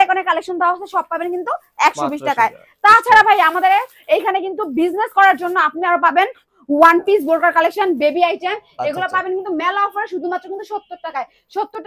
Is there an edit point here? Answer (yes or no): no